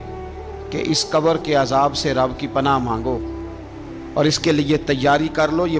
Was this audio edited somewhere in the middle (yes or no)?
no